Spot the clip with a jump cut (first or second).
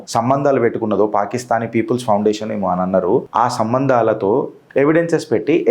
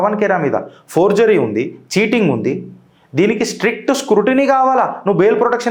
first